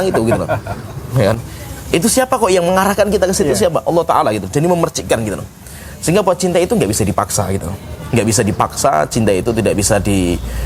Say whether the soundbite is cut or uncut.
uncut